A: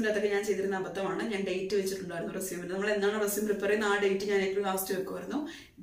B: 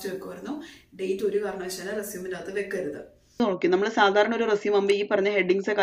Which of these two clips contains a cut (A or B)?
B